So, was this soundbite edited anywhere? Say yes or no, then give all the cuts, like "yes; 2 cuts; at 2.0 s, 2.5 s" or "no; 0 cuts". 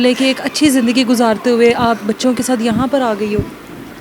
no; 0 cuts